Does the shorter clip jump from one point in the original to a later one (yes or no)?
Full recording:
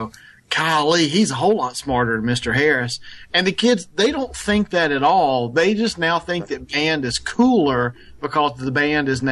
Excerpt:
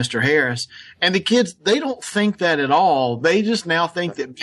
no